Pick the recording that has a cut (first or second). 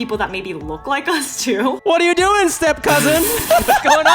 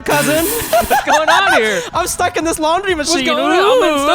first